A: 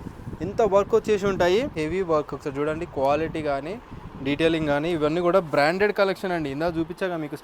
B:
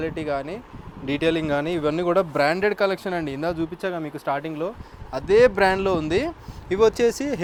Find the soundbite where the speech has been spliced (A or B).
A